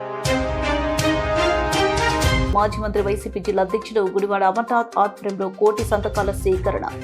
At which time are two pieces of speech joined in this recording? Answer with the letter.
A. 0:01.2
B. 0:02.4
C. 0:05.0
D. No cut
B